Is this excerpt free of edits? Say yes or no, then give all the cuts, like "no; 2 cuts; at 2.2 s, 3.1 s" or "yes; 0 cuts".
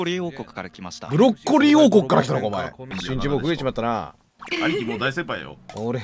no; 1 cut; at 3.0 s